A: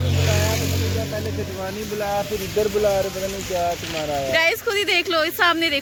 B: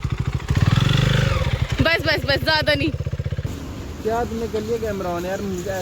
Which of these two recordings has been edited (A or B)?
B